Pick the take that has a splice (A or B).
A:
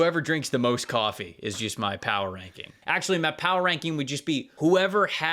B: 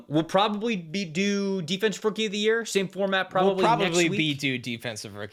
A